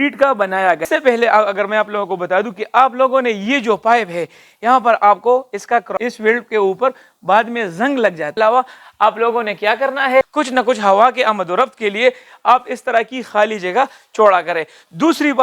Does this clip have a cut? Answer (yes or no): yes